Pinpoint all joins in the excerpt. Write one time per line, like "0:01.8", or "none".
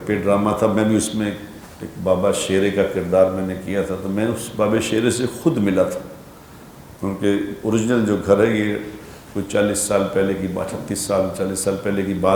none